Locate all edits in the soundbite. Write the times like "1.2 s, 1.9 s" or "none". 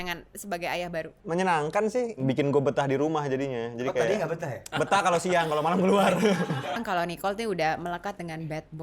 1.2 s, 2.2 s, 4.6 s, 6.8 s